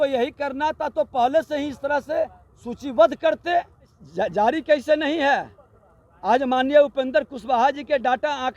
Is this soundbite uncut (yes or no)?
no